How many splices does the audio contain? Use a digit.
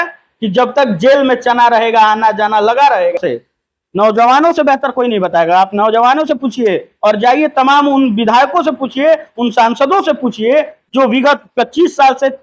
1